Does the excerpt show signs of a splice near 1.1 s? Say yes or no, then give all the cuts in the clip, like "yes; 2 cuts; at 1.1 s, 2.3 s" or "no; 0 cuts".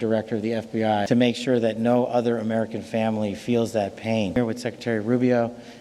yes; 2 cuts; at 1.1 s, 4.4 s